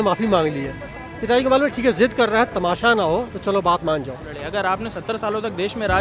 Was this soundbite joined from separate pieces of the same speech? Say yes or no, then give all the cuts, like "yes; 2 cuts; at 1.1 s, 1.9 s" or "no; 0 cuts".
yes; 1 cut; at 4.3 s